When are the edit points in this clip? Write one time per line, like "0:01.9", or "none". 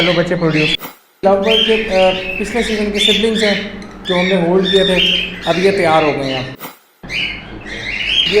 0:01.2
0:06.9